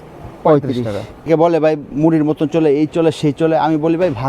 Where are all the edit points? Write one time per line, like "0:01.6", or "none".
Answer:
0:01.3